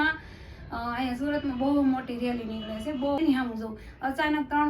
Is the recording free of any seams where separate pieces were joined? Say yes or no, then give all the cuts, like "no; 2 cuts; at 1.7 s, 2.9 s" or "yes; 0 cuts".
no; 1 cut; at 3.3 s